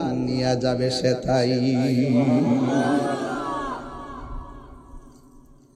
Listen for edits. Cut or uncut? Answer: uncut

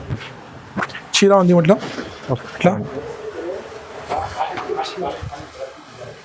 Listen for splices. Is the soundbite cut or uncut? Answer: uncut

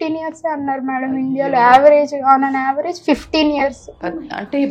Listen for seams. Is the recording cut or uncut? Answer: uncut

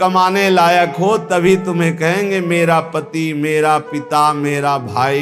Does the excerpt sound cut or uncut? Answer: uncut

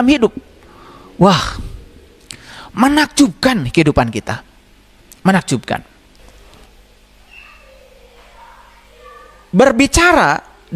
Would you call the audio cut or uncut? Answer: cut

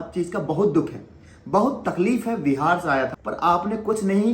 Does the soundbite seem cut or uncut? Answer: cut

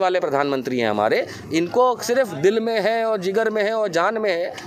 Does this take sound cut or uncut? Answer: uncut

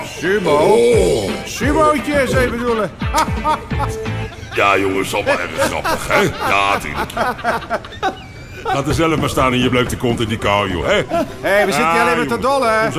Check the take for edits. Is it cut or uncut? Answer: uncut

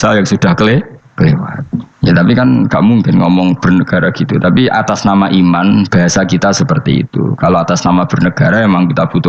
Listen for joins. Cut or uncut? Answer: uncut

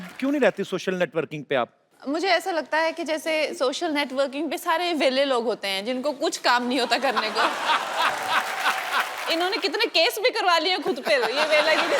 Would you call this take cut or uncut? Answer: cut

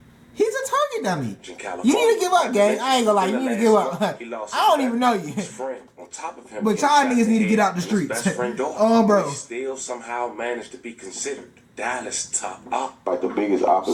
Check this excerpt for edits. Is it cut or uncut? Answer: uncut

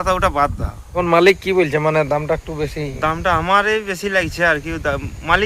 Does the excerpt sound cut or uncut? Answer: cut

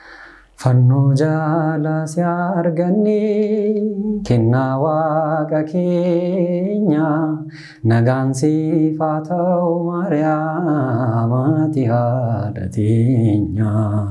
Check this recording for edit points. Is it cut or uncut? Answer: uncut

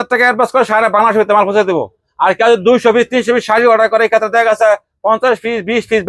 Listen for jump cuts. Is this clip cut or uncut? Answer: uncut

